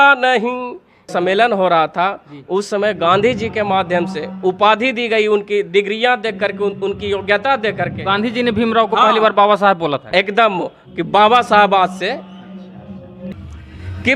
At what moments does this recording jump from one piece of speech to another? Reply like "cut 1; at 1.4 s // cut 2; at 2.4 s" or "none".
cut 1; at 1.0 s // cut 2; at 13.1 s